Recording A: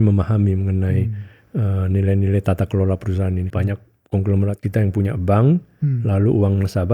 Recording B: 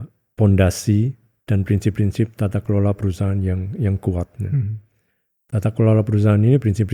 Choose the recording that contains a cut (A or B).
A